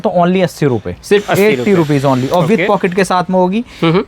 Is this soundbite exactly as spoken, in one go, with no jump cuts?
yes; 0 cuts

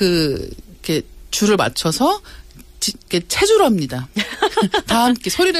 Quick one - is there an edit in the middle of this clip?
no; 0 cuts

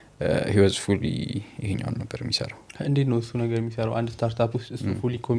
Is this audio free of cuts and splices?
yes; 0 cuts

